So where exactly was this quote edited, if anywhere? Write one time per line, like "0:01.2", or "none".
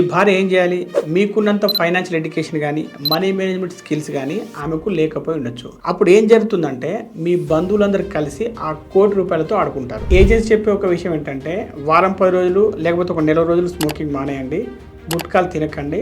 0:10.0